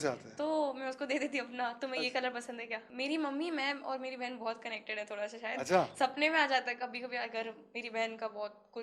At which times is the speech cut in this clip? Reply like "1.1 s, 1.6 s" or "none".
2.8 s